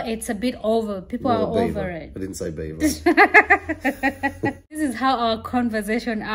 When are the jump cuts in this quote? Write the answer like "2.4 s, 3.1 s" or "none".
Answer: 4.8 s